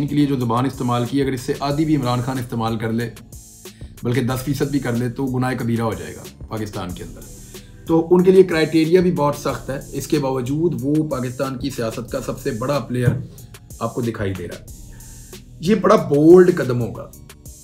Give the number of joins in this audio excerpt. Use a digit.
0